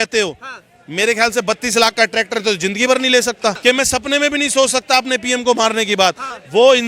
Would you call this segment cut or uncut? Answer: cut